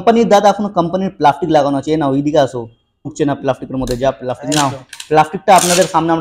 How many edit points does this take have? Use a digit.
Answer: 1